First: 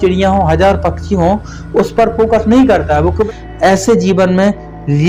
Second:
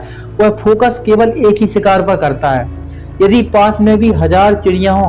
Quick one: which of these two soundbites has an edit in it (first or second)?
first